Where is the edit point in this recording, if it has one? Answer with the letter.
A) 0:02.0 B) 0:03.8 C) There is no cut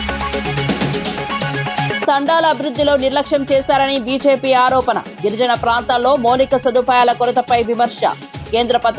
A